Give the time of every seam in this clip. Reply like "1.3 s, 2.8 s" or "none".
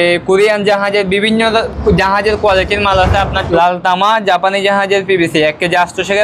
3.4 s